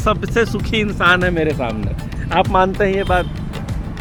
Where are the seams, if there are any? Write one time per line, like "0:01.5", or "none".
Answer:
none